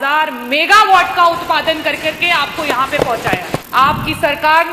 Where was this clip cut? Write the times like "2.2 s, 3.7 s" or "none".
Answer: 3.6 s